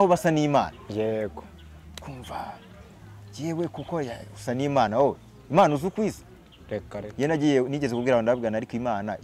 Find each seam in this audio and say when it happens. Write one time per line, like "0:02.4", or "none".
none